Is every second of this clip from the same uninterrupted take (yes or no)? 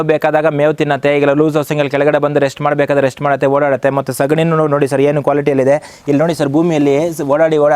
yes